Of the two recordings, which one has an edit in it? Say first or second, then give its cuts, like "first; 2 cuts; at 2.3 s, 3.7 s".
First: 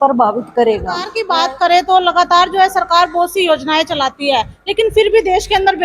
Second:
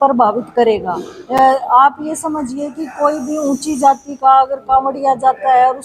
first; 1 cut; at 1.1 s